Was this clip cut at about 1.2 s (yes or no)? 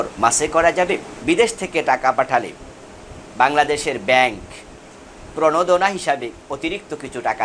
yes